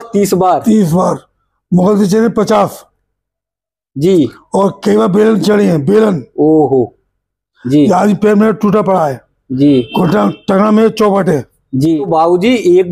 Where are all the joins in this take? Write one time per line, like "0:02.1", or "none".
0:12.0

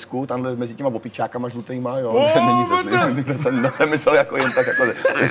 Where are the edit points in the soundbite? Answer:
none

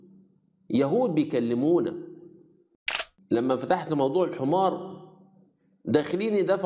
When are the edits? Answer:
0:02.8

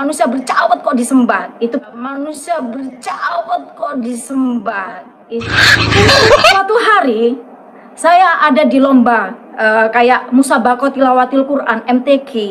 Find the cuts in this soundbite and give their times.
0:06.5

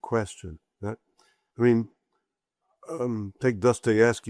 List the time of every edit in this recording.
none

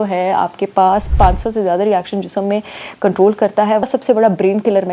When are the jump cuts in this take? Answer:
0:03.8

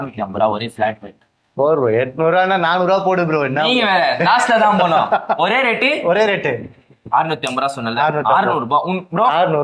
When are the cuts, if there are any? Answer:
none

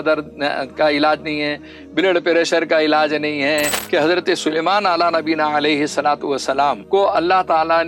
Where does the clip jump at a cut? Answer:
0:03.8
0:06.8

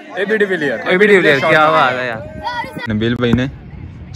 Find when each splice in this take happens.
0:02.8

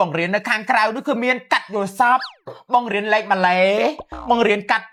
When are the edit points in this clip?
none

